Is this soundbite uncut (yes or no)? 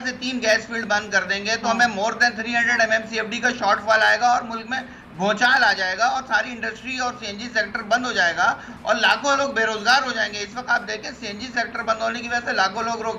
yes